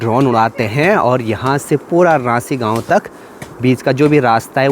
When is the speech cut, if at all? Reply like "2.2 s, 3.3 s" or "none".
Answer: none

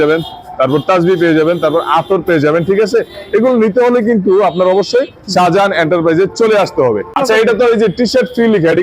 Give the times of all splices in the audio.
7.1 s

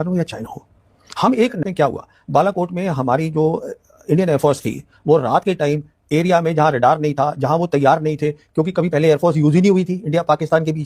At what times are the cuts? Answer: 1.6 s

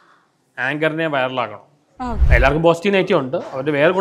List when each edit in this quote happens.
2.2 s

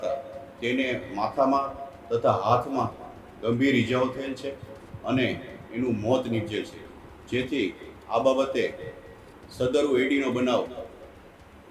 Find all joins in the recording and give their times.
none

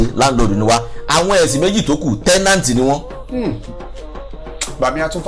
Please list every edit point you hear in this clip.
none

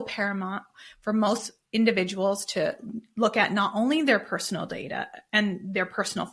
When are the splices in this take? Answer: none

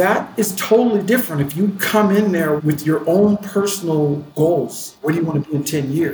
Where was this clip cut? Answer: 2.6 s, 4.3 s, 4.9 s

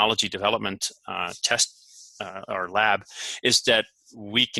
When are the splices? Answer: none

